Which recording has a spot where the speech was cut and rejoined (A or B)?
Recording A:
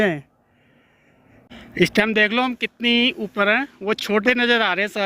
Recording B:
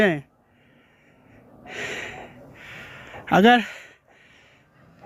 A